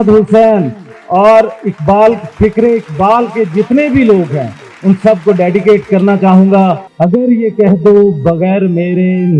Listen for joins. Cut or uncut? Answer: cut